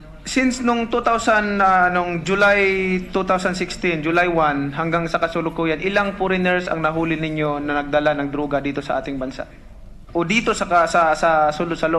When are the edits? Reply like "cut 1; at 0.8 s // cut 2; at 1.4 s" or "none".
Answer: cut 1; at 10.8 s

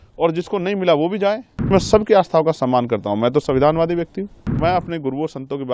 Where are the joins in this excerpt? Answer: cut 1; at 1.7 s // cut 2; at 4.5 s

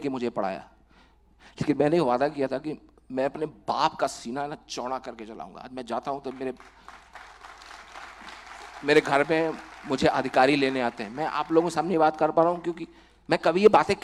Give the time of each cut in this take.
none

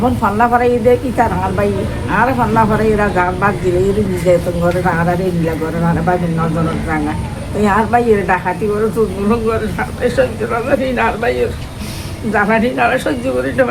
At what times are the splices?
none

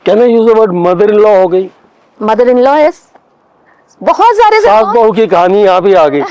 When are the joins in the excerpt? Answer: none

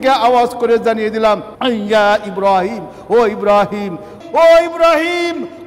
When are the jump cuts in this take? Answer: cut 1; at 1.5 s // cut 2; at 4.1 s

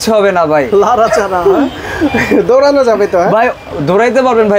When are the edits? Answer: none

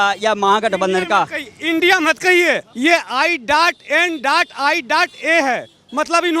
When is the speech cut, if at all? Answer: cut 1; at 2.7 s

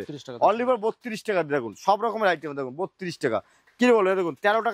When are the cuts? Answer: none

